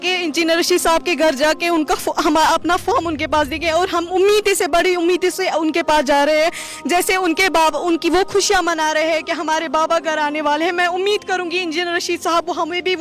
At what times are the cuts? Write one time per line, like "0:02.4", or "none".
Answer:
none